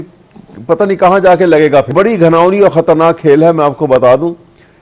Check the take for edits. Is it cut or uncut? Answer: cut